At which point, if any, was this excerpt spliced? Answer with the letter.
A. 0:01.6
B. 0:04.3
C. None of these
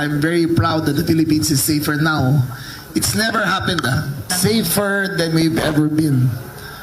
B